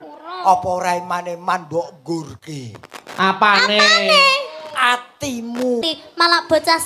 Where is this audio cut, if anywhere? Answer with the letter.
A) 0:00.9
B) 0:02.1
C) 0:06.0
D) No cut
C